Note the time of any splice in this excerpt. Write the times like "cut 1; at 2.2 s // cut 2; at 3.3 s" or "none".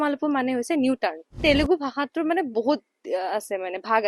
cut 1; at 1.4 s